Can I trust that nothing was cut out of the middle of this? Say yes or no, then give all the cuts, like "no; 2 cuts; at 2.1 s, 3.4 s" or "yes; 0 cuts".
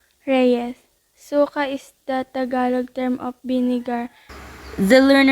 yes; 0 cuts